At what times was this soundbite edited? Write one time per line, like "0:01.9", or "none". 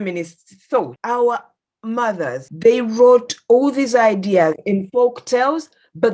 0:01.0
0:02.4